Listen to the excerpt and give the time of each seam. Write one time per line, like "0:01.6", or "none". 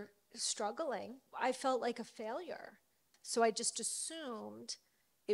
0:01.2
0:03.1